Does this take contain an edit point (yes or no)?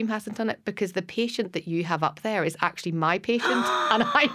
no